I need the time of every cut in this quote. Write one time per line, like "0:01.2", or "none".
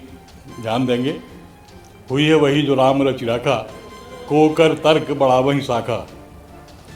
none